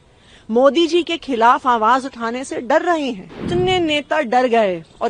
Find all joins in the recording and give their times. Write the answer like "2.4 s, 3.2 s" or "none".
3.3 s